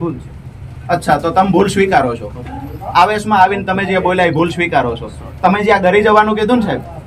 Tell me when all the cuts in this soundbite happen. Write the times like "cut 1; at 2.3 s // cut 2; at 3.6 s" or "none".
none